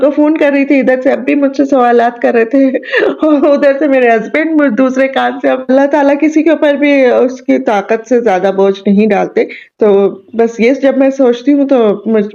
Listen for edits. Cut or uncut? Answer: cut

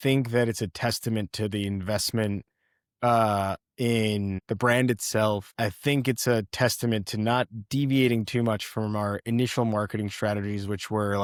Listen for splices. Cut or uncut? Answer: uncut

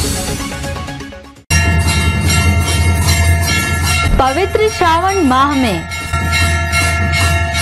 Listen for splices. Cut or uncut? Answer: uncut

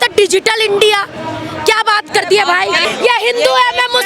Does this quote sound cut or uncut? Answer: cut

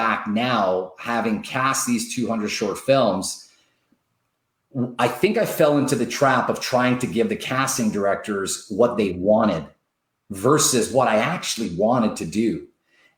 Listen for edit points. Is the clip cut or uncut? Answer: uncut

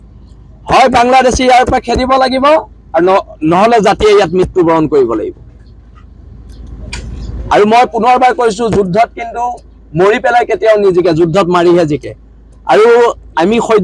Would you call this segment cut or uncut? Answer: uncut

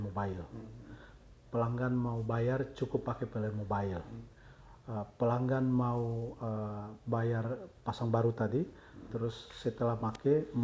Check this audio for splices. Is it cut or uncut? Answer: uncut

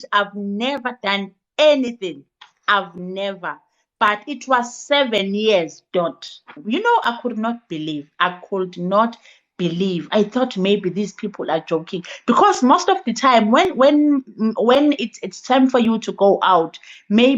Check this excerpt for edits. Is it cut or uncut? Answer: cut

